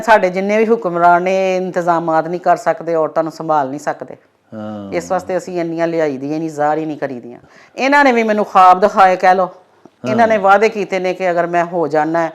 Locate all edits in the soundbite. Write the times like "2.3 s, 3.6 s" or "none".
7.4 s